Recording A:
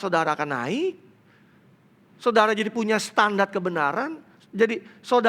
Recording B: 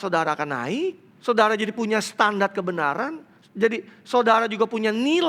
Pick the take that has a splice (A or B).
B